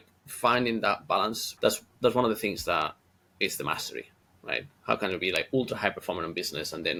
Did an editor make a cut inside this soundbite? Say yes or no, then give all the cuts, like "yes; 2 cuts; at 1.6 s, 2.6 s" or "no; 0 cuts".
no; 0 cuts